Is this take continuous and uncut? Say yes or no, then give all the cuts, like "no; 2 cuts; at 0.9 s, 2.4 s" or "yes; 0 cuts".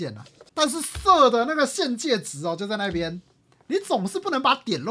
yes; 0 cuts